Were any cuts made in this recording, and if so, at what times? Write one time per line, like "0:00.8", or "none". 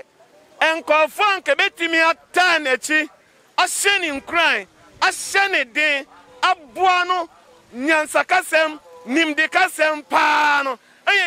none